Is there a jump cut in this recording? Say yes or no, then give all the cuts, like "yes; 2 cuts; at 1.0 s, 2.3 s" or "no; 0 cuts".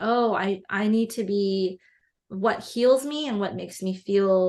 no; 0 cuts